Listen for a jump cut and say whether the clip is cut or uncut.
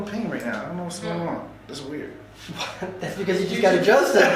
uncut